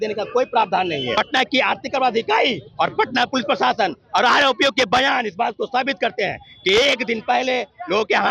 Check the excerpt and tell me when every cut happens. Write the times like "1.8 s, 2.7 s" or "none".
1.1 s